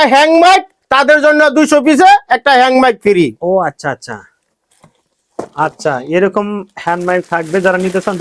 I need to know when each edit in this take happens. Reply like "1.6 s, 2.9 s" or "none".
none